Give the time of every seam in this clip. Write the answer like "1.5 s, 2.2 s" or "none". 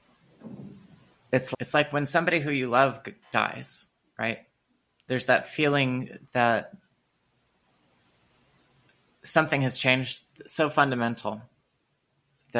5.0 s